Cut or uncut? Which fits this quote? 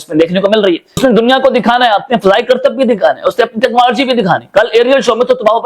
cut